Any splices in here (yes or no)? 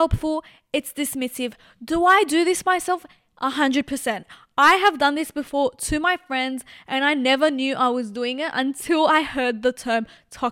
no